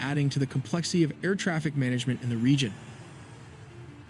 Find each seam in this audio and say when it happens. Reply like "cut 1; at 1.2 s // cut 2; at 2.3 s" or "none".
none